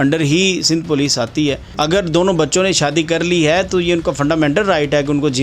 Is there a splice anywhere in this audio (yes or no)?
yes